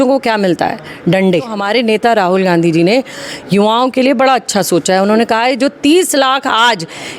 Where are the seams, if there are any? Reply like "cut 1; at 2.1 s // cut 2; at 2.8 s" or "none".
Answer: cut 1; at 1.6 s